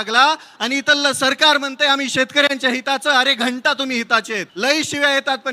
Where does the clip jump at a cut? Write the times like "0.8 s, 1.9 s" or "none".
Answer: 4.5 s